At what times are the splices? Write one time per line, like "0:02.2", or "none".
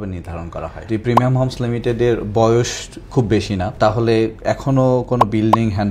0:00.9
0:03.7